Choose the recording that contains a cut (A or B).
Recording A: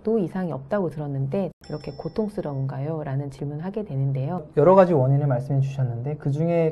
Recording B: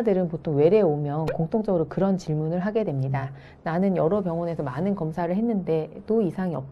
A